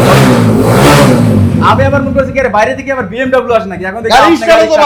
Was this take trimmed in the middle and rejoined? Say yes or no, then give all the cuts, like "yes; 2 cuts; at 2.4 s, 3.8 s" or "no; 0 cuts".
no; 0 cuts